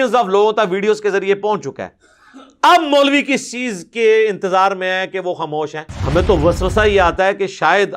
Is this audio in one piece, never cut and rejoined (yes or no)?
no